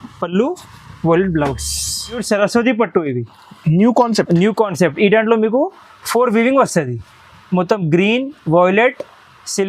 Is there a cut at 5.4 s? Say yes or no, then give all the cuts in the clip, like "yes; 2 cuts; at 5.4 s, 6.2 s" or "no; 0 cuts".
no; 1 cut; at 2.2 s